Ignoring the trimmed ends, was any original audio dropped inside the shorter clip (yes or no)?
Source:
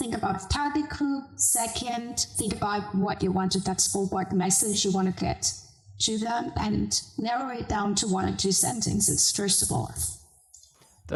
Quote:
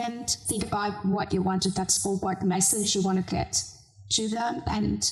no